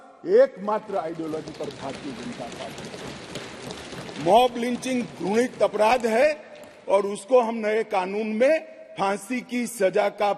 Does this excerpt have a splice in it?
no; 0 cuts

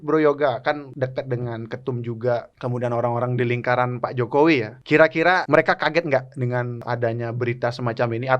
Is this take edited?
yes; 4 cuts; at 0.9 s, 2.5 s, 5.3 s, 6.8 s

